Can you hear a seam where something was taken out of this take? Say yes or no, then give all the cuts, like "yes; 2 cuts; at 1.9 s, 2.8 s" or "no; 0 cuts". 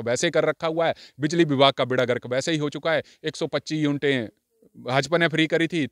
no; 0 cuts